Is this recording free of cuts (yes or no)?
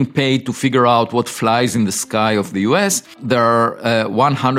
no